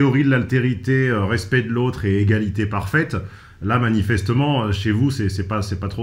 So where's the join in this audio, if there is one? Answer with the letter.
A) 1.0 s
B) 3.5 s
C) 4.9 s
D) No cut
D